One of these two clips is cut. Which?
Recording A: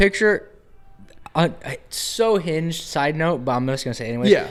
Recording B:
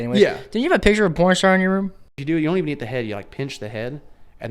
B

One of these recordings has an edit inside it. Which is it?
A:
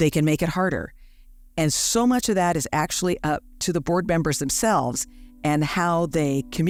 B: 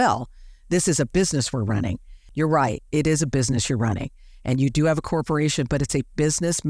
B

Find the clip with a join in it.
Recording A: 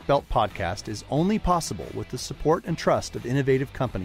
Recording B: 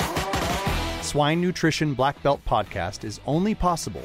B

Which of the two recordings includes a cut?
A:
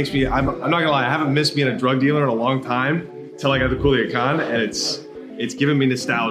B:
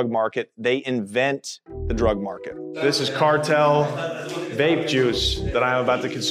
B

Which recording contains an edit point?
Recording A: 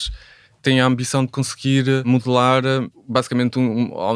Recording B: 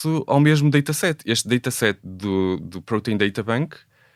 A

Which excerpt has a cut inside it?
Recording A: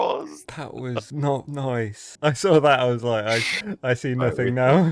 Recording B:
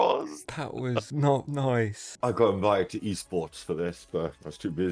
B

